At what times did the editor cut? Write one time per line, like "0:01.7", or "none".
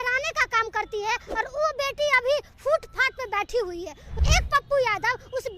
0:04.1